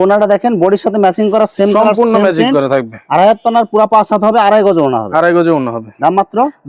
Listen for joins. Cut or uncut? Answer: uncut